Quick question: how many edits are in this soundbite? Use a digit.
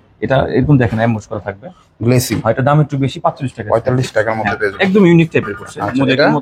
0